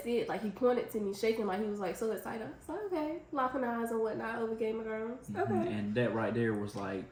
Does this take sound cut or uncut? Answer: uncut